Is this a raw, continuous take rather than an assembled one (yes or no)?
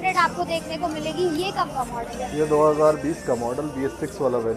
yes